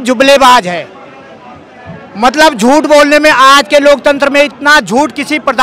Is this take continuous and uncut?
yes; 0 cuts

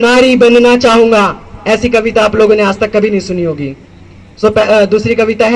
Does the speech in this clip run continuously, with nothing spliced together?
yes; 0 cuts

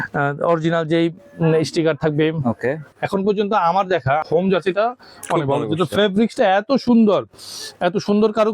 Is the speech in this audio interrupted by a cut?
yes; 2 cuts; at 2.9 s, 4.2 s

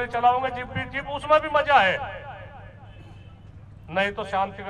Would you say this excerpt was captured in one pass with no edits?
yes; 0 cuts

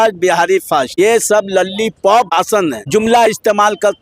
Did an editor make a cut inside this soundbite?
yes; 2 cuts; at 0.9 s, 2.5 s

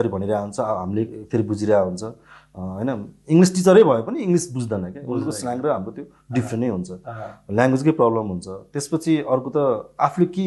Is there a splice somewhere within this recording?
no; 0 cuts

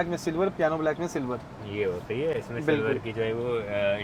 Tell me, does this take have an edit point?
no; 0 cuts

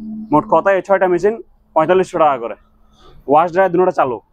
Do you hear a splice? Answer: no; 0 cuts

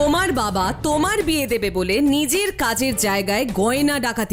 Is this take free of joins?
yes; 0 cuts

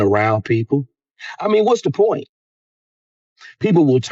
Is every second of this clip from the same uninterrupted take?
yes; 0 cuts

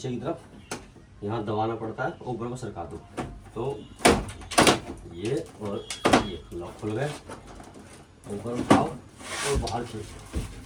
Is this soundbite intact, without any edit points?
yes; 0 cuts

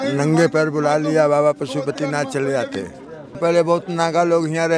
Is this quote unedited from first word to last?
no; 1 cut; at 3.4 s

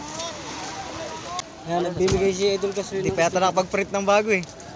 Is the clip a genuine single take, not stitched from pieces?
no; 1 cut; at 1.4 s

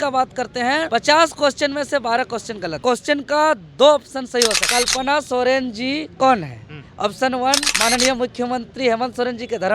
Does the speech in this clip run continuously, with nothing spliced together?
no; 2 cuts; at 2.8 s, 4.6 s

